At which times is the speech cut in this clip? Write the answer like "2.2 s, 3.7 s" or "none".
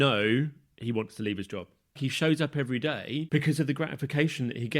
1.9 s, 3.3 s